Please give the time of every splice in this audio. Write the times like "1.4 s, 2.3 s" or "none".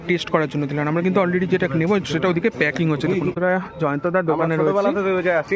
3.4 s